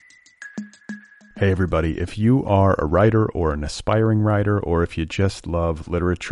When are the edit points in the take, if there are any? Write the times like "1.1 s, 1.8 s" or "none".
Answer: 0.9 s